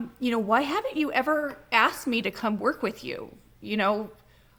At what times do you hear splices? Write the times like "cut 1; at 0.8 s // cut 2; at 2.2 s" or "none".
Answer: none